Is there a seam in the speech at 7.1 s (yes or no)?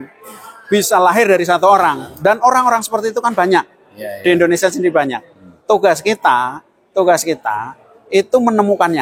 no